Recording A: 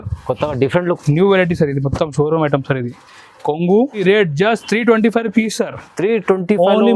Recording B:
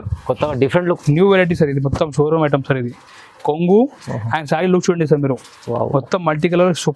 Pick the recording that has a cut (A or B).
A